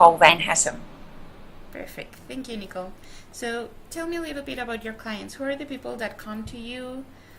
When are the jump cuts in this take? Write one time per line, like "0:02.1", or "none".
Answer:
0:06.4